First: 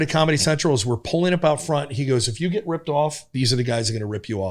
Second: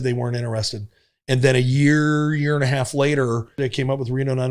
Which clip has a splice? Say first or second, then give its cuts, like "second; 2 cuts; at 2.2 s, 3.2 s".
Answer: second; 1 cut; at 3.6 s